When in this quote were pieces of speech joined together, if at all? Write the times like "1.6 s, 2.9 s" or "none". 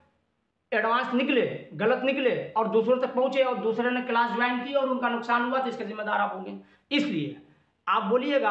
none